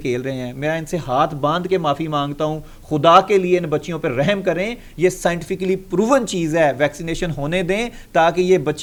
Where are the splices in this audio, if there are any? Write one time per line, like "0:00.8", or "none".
none